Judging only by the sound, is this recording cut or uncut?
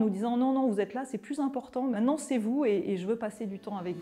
uncut